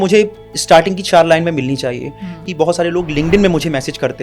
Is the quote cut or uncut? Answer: cut